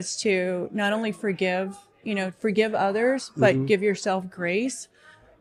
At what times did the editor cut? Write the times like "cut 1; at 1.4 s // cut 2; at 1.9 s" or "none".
none